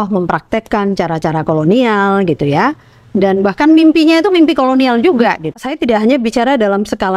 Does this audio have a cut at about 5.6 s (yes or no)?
yes